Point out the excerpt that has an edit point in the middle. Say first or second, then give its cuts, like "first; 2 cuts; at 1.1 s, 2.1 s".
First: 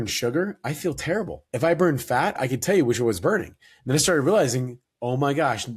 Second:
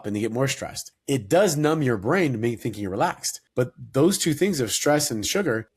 first; 2 cuts; at 1.4 s, 2.3 s